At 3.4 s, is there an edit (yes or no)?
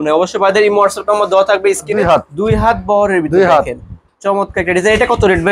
no